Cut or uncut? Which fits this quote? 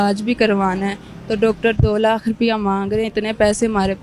uncut